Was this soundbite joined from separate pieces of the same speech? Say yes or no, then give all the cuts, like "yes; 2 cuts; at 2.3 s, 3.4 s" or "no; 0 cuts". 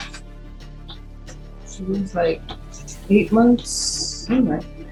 no; 0 cuts